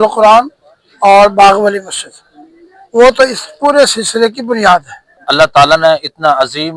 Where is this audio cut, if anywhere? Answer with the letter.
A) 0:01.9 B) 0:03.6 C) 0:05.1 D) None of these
C